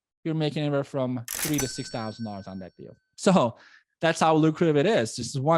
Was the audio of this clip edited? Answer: no; 0 cuts

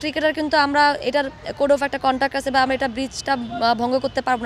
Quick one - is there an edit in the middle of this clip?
no; 0 cuts

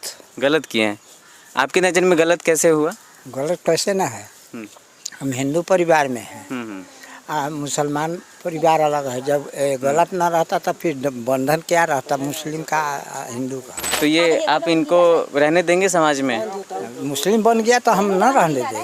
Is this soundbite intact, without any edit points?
no; 1 cut; at 14.0 s

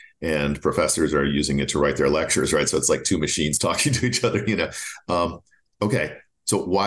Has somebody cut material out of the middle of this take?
no; 0 cuts

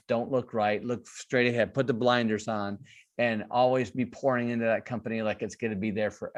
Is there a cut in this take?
no; 0 cuts

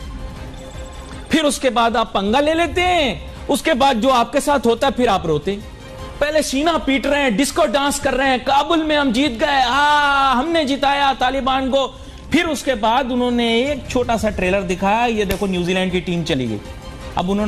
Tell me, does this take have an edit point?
no; 0 cuts

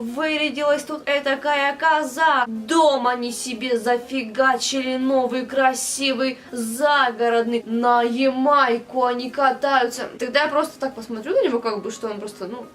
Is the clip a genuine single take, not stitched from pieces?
no; 3 cuts; at 2.6 s, 7.7 s, 10.1 s

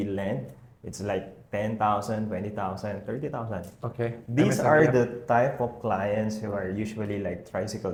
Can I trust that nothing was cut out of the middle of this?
yes; 0 cuts

